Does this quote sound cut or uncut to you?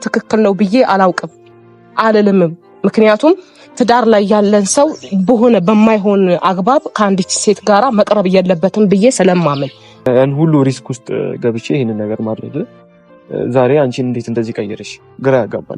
cut